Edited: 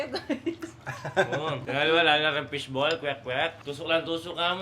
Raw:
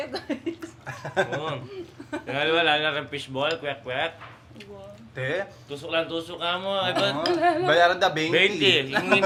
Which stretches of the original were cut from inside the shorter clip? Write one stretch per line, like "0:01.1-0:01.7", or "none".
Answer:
0:01.6-0:02.2
0:04.2-0:05.7